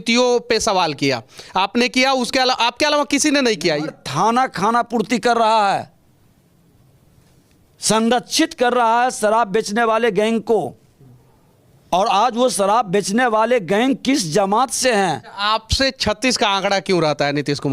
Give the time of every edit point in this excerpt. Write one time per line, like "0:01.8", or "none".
0:04.0
0:15.3